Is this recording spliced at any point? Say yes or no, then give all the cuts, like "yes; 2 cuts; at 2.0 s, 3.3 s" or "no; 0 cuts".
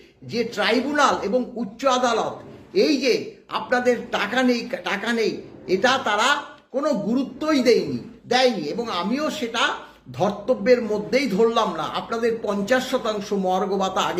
no; 0 cuts